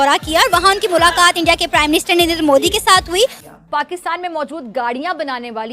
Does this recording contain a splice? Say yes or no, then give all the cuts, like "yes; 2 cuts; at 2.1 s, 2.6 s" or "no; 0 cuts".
yes; 1 cut; at 3.4 s